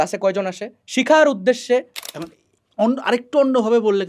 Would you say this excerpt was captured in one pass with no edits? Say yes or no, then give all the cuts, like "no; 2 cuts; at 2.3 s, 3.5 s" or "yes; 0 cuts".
no; 1 cut; at 2.0 s